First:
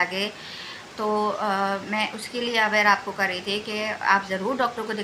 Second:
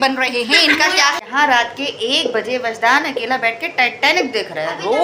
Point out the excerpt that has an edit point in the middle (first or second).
second